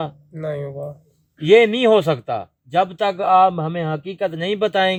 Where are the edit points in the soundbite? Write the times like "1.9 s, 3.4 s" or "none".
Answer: none